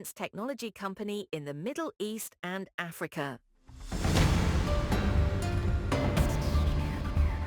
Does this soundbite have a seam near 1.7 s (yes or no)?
no